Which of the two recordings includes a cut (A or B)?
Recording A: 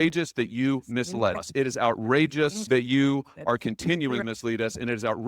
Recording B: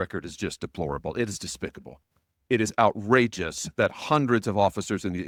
A